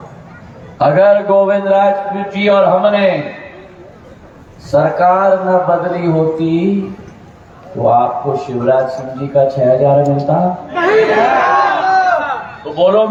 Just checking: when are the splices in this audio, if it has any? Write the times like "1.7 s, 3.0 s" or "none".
none

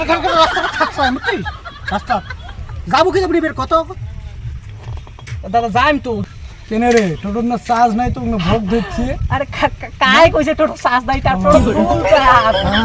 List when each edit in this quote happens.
6.2 s

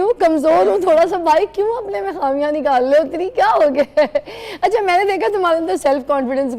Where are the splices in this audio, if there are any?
none

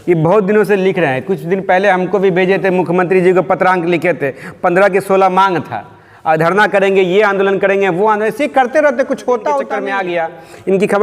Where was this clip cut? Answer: 9.8 s

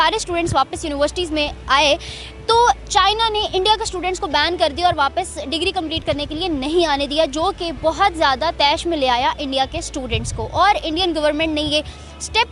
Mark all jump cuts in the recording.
none

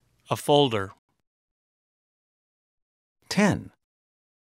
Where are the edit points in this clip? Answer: 1.0 s

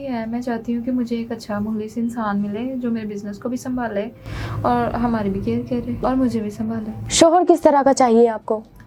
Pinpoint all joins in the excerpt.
none

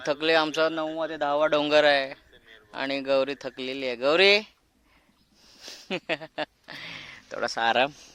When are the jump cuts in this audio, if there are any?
none

